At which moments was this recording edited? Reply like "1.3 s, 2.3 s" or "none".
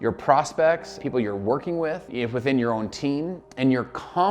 0.9 s, 2.1 s